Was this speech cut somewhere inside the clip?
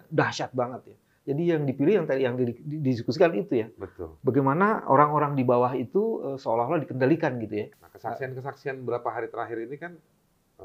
yes; 1 cut; at 7.8 s

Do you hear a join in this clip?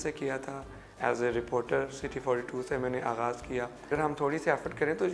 yes; 1 cut; at 3.9 s

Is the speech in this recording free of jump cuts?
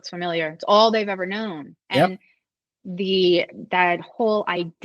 yes; 0 cuts

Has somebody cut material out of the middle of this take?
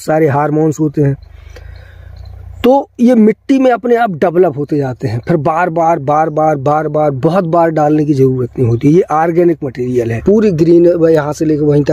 yes; 1 cut; at 10.1 s

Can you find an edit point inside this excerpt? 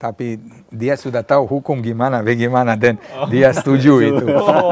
no; 0 cuts

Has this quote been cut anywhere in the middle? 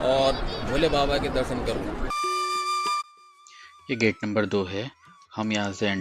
yes; 1 cut; at 2.1 s

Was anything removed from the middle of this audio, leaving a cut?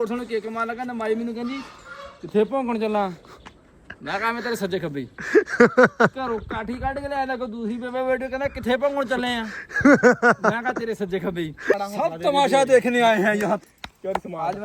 yes; 2 cuts; at 11.7 s, 13.6 s

